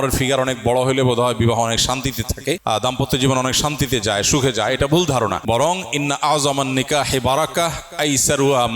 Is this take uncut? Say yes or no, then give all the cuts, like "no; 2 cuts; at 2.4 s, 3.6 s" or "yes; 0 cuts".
no; 2 cuts; at 2.6 s, 5.4 s